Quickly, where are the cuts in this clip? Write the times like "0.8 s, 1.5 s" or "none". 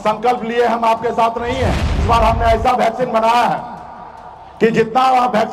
2.0 s